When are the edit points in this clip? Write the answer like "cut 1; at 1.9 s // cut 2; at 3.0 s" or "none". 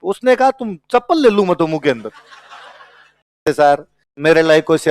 cut 1; at 3.4 s